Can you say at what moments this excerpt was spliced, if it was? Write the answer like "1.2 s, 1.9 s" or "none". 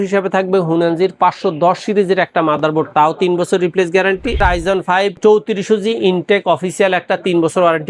4.4 s